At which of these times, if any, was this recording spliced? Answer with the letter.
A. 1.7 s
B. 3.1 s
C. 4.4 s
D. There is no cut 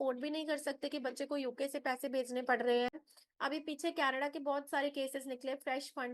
B